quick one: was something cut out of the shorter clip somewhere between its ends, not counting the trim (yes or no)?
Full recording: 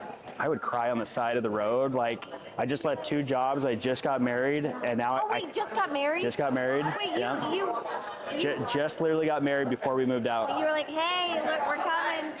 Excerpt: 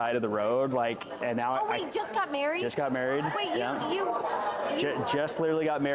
yes